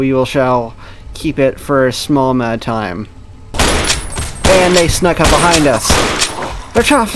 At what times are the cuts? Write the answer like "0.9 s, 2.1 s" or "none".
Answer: 3.5 s